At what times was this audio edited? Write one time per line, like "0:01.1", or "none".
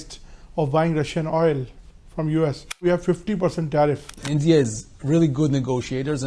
0:02.8
0:04.2